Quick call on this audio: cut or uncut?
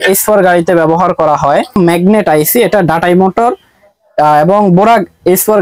cut